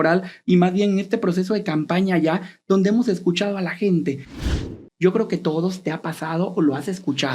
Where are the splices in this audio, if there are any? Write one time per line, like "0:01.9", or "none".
0:04.3